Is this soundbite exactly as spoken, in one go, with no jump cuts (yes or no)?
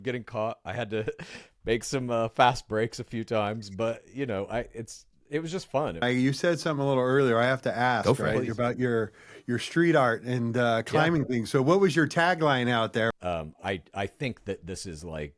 no